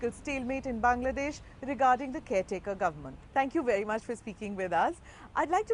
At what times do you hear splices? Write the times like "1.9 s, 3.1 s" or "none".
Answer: none